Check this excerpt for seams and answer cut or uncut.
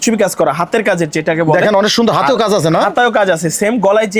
uncut